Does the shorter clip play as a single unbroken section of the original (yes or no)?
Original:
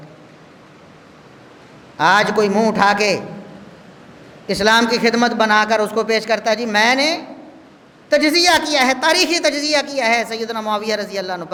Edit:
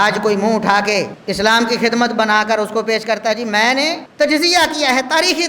no